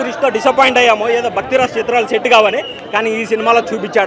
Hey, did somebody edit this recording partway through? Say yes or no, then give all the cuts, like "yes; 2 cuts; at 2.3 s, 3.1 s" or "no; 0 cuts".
no; 0 cuts